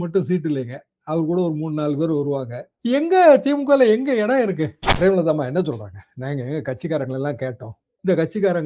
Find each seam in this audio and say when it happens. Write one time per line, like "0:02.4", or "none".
0:04.8